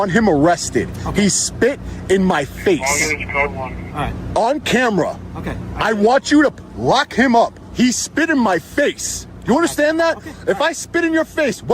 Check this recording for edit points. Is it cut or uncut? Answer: uncut